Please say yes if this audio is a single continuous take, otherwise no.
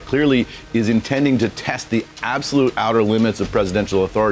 yes